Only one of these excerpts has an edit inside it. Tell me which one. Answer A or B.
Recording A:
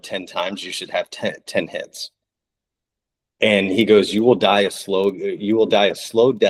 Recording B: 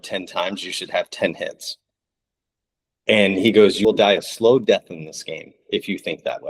B